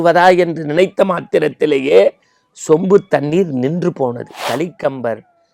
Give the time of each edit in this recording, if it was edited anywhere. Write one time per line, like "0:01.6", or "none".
0:04.4